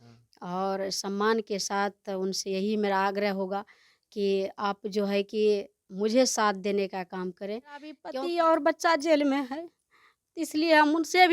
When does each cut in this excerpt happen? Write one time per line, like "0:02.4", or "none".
0:08.0